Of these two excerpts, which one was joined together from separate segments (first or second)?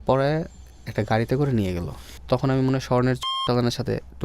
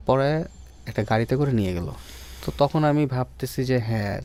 first